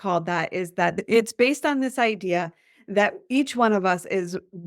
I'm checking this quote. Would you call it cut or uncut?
cut